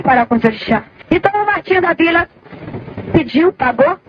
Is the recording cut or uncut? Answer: cut